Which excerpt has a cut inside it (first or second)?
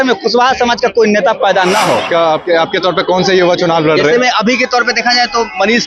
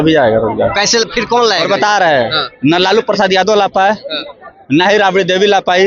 first